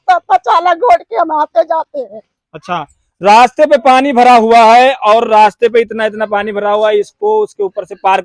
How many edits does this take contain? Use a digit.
0